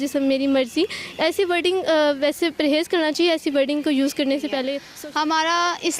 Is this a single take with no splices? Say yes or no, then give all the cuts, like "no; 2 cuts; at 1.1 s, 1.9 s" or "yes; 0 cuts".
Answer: no; 1 cut; at 4.9 s